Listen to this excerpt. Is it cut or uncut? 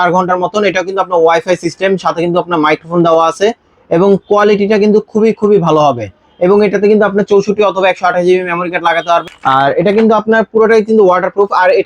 cut